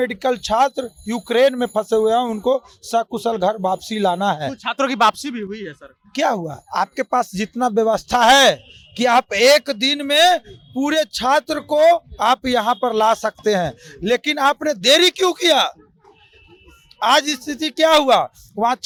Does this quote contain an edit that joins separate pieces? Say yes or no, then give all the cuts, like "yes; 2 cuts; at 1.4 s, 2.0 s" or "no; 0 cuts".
no; 0 cuts